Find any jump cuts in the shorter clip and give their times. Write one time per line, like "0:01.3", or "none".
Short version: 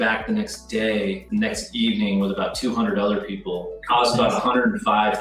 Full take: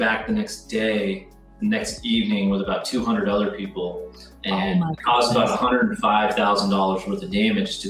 0:01.2
0:03.8